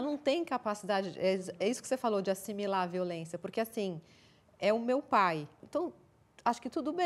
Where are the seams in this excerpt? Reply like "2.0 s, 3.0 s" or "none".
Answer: 5.6 s